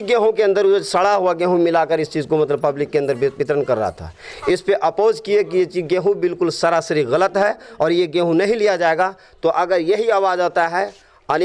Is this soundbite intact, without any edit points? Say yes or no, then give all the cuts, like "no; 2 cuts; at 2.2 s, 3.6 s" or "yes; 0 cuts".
yes; 0 cuts